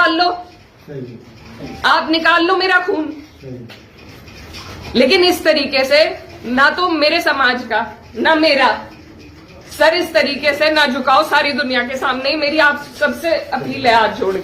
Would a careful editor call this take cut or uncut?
uncut